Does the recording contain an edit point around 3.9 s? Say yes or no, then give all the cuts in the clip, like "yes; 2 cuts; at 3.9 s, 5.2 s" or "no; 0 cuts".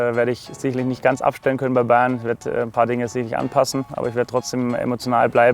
yes; 1 cut; at 3.9 s